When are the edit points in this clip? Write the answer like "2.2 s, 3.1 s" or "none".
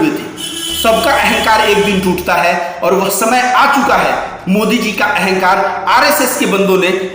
none